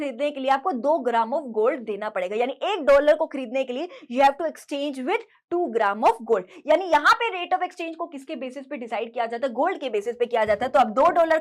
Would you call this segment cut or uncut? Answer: uncut